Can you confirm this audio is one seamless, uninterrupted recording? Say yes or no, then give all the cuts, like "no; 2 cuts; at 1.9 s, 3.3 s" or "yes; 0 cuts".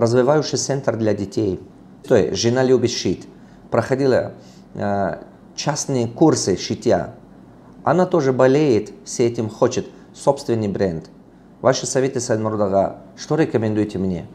no; 1 cut; at 1.7 s